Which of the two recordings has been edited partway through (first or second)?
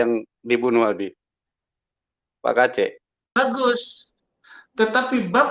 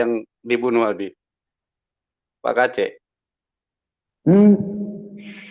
first